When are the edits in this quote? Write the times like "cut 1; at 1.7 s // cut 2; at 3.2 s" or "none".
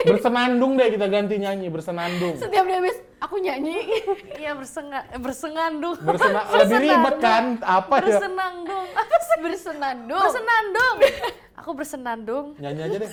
none